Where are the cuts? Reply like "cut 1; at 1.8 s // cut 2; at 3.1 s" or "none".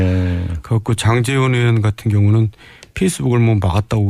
cut 1; at 2.4 s